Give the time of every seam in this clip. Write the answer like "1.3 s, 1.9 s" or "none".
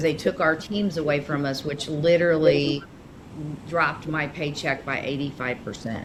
none